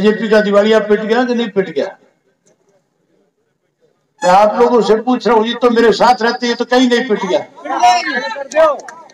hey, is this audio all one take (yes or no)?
yes